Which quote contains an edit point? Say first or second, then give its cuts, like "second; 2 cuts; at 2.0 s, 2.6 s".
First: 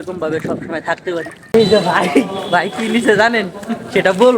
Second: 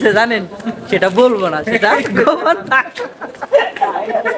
first; 1 cut; at 1.5 s